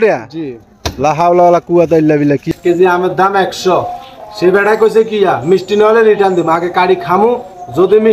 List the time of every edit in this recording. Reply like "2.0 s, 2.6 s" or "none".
2.4 s